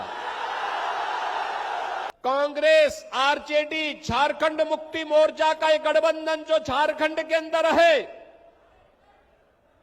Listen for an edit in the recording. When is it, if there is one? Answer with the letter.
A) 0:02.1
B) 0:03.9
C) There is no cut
A